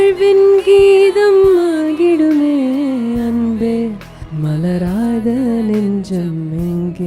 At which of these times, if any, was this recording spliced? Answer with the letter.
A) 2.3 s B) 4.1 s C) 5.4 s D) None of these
B